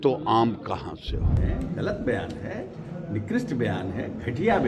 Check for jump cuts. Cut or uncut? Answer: cut